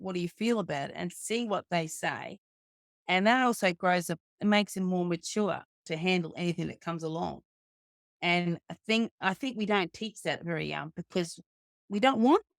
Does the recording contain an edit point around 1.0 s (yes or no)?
no